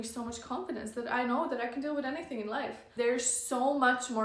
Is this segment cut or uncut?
cut